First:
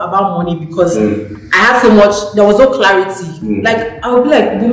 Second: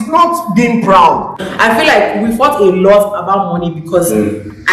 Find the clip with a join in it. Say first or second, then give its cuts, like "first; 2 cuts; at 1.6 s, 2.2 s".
second; 1 cut; at 1.4 s